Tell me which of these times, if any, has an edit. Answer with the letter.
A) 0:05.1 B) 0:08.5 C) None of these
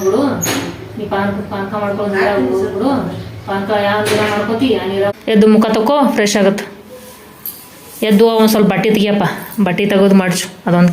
A